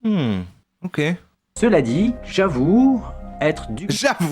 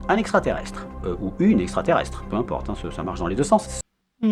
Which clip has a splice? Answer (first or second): first